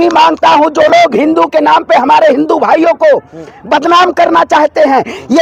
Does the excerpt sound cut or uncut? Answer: uncut